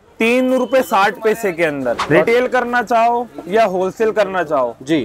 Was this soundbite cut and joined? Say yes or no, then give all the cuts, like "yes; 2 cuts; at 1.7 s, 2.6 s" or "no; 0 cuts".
yes; 1 cut; at 2.0 s